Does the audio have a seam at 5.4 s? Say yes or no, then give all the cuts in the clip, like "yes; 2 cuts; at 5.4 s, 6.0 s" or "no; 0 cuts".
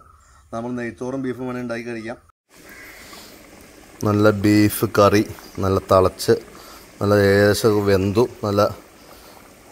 no; 1 cut; at 2.5 s